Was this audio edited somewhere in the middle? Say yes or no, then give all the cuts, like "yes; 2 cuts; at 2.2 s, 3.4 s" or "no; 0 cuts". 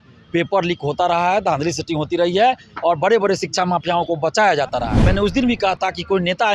yes; 1 cut; at 5.0 s